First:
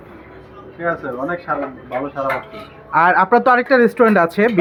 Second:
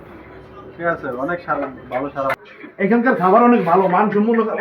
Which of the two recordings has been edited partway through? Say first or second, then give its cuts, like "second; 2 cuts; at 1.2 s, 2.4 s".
second; 1 cut; at 2.3 s